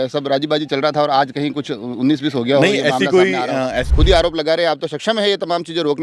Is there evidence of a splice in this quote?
yes; 1 cut; at 3.9 s

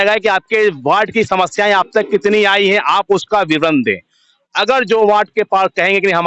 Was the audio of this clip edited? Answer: no; 0 cuts

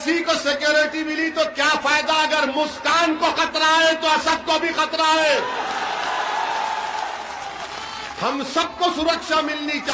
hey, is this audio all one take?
yes; 0 cuts

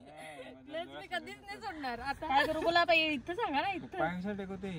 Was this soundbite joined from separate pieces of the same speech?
yes; 1 cut; at 2.2 s

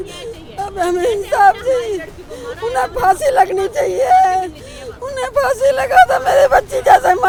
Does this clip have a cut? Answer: no; 0 cuts

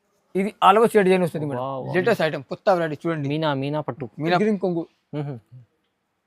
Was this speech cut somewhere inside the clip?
yes; 1 cut; at 4.4 s

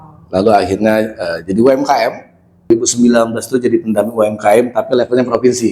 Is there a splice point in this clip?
yes; 1 cut; at 2.7 s

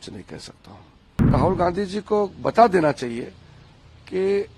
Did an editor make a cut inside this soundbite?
yes; 1 cut; at 1.3 s

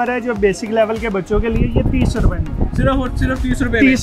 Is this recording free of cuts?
yes; 0 cuts

